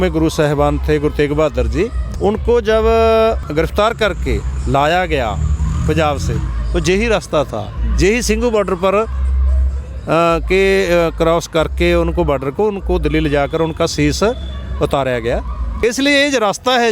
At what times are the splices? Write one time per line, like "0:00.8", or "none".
0:02.0
0:03.4
0:15.8